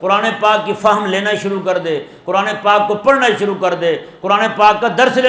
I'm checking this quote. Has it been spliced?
no; 0 cuts

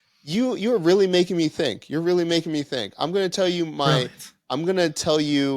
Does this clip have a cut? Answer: no; 0 cuts

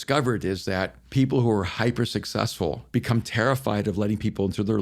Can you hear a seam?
yes; 2 cuts; at 1.0 s, 2.8 s

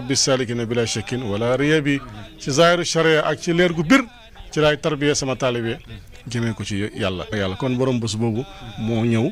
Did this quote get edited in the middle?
yes; 1 cut; at 7.3 s

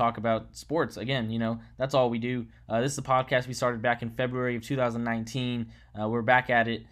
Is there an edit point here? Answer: no; 0 cuts

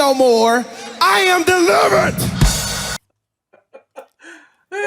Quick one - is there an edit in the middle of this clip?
yes; 1 cut; at 3.3 s

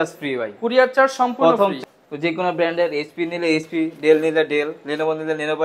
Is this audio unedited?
no; 1 cut; at 1.8 s

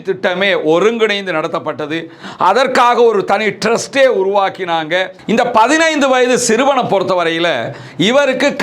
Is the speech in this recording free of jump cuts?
no; 1 cut; at 5.2 s

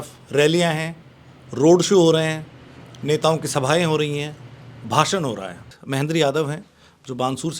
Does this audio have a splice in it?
yes; 1 cut; at 5.7 s

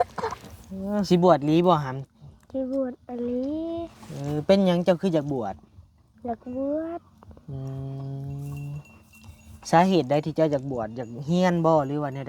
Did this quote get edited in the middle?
yes; 1 cut; at 1.1 s

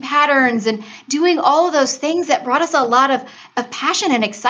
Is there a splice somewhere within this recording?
no; 0 cuts

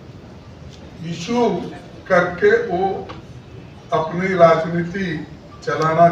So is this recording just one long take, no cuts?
yes; 0 cuts

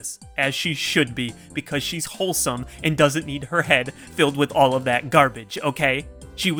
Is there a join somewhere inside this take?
no; 0 cuts

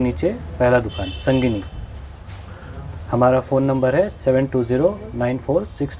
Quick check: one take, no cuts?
yes; 0 cuts

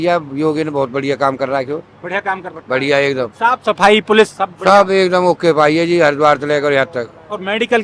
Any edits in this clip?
no; 0 cuts

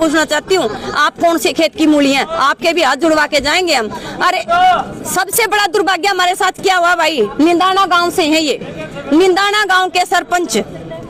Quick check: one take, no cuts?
yes; 0 cuts

